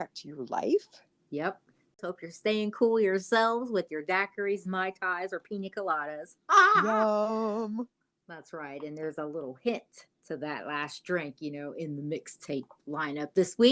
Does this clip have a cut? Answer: yes; 1 cut; at 2.0 s

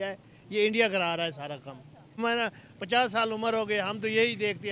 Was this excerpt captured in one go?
no; 1 cut; at 2.2 s

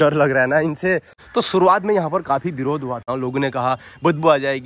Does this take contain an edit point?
yes; 2 cuts; at 1.2 s, 3.0 s

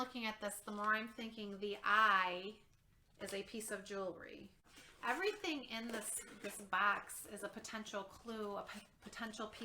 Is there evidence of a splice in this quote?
yes; 1 cut; at 4.6 s

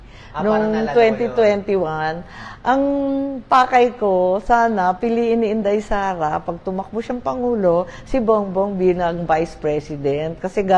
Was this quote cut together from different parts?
no; 0 cuts

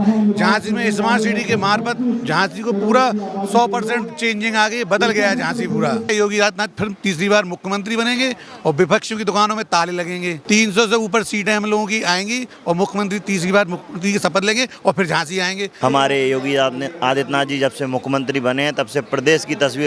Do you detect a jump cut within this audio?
yes; 2 cuts; at 6.1 s, 15.8 s

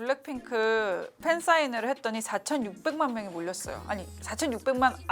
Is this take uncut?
yes; 0 cuts

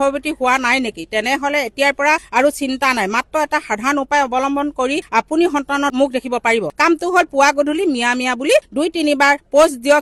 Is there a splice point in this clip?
no; 0 cuts

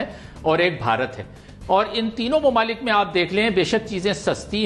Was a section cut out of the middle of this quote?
no; 0 cuts

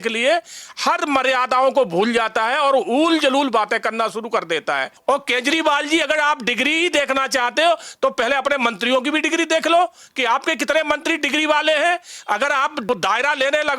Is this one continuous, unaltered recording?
no; 2 cuts; at 4.9 s, 12.9 s

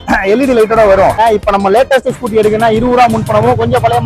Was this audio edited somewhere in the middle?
yes; 1 cut; at 1.2 s

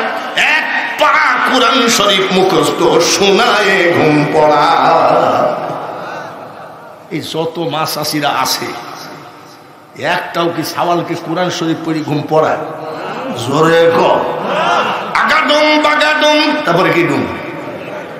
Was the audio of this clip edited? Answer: no; 0 cuts

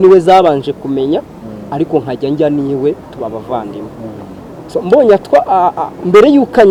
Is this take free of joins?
yes; 0 cuts

